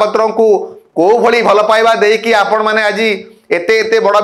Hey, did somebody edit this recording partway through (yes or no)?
no